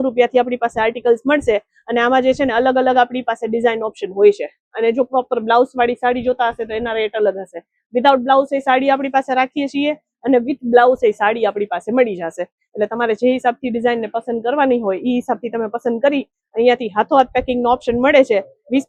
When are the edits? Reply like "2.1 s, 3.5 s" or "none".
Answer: none